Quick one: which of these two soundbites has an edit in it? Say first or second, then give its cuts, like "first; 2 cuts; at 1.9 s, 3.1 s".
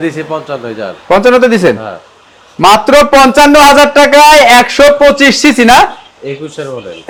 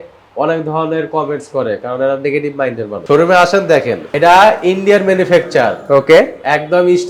second; 2 cuts; at 3.0 s, 4.0 s